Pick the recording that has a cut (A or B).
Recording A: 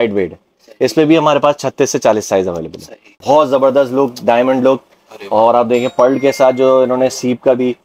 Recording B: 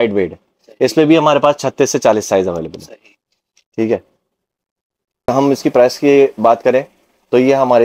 A